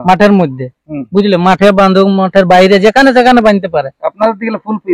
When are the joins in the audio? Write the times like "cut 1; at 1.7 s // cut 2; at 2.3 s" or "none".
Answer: none